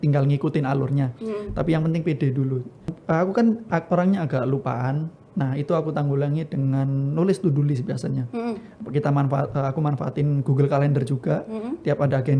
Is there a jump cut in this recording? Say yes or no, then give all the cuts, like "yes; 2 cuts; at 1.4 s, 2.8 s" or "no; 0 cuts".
yes; 1 cut; at 3.0 s